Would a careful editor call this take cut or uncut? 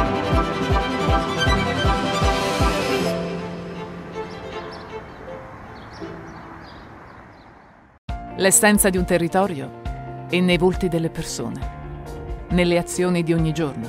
cut